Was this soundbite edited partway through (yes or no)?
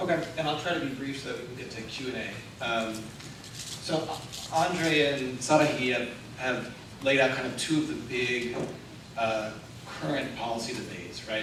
no